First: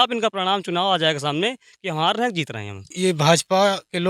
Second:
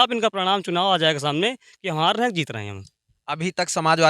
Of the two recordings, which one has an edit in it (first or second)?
first